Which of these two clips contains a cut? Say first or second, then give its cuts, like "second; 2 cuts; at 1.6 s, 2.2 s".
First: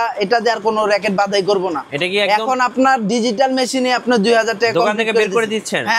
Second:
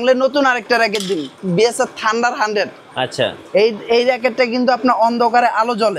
second; 1 cut; at 1.4 s